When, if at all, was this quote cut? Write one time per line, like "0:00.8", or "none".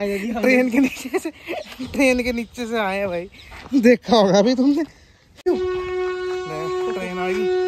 0:05.5